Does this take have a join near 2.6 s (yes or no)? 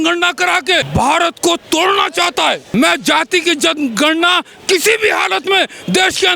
yes